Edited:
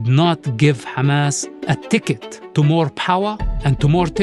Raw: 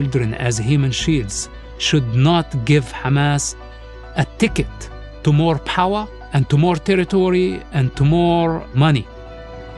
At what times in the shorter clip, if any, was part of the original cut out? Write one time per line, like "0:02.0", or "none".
0:01.5
0:02.3